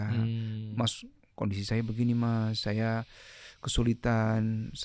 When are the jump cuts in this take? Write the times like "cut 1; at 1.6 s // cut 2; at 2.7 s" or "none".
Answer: none